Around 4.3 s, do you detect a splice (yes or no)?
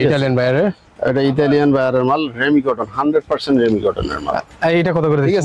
no